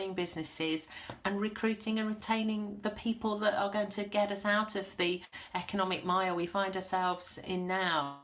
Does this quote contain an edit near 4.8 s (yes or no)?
no